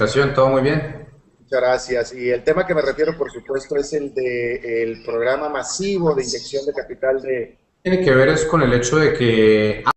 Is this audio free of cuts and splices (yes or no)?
yes